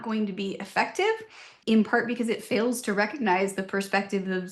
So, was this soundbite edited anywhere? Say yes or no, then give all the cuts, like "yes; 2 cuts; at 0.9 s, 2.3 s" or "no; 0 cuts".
yes; 1 cut; at 1.6 s